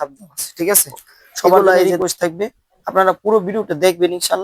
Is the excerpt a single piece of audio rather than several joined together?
no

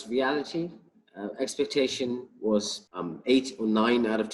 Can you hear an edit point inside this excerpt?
yes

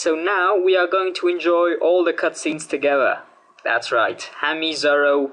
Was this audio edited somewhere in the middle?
yes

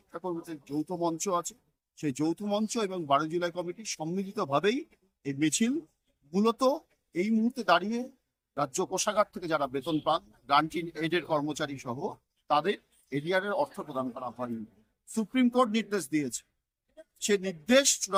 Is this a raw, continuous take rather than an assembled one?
yes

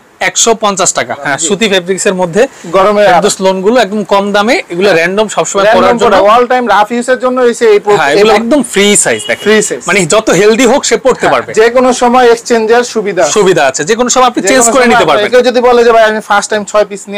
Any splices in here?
yes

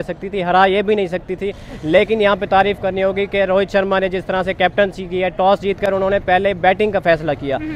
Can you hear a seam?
no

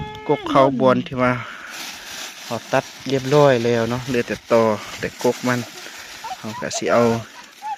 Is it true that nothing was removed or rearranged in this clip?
yes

